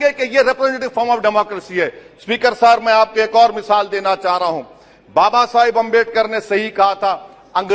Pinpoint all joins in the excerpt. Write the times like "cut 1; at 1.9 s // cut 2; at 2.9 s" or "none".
none